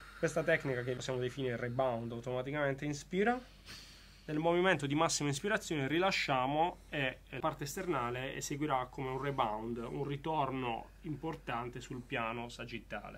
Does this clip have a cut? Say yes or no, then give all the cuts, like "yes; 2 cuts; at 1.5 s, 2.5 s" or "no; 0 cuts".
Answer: yes; 2 cuts; at 1.0 s, 7.4 s